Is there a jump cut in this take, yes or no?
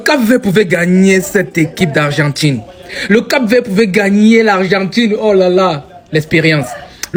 no